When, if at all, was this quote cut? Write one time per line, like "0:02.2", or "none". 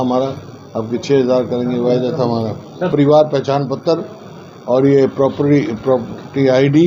0:02.8